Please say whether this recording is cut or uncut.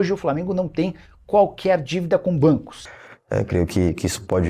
cut